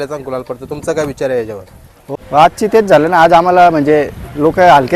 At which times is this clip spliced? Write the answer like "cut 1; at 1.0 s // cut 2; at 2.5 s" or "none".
cut 1; at 2.0 s